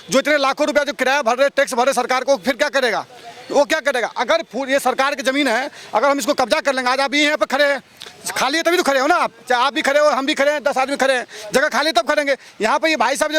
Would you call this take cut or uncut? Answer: uncut